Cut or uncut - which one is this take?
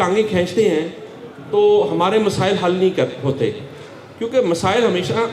uncut